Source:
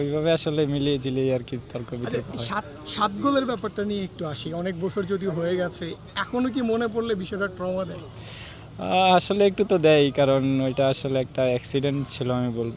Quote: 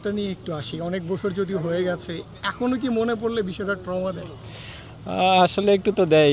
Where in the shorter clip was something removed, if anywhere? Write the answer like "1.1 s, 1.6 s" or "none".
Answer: none